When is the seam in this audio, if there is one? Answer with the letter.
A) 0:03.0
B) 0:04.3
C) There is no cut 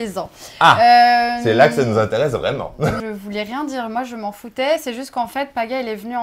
A